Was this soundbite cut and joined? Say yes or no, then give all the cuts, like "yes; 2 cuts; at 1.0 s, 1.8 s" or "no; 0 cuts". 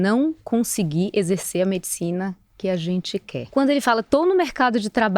yes; 1 cut; at 3.4 s